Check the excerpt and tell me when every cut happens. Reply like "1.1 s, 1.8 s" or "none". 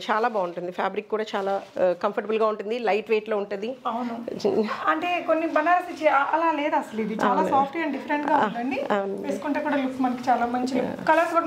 none

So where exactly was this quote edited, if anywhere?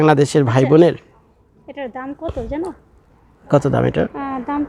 none

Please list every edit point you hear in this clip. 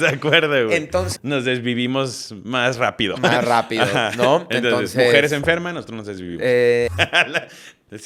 1.1 s, 6.9 s

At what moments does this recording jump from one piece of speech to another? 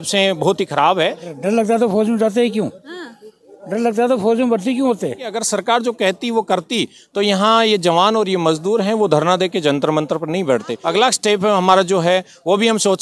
1.3 s, 5.3 s, 10.7 s

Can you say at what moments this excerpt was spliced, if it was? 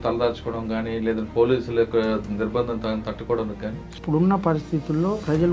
4.0 s

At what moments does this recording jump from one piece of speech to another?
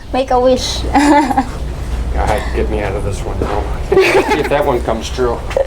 4.4 s

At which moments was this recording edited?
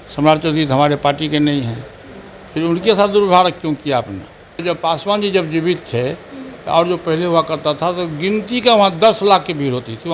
4.6 s

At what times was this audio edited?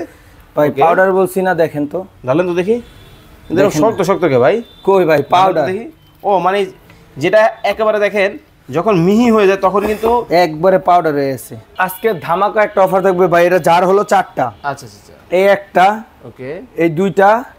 11.7 s

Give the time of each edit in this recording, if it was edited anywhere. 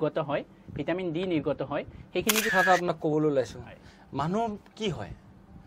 2.5 s

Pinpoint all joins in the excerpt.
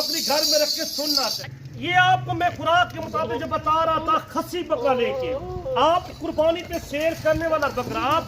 1.4 s

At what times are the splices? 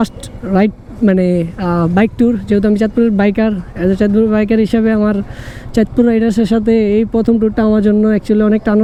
none

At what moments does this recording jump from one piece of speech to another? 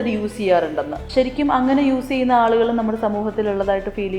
1.1 s

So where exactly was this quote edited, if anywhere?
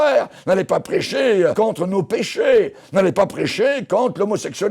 1.5 s

